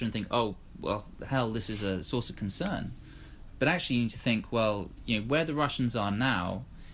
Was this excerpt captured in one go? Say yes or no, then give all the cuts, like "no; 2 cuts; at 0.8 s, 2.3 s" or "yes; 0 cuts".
yes; 0 cuts